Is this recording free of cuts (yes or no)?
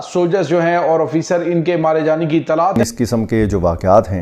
no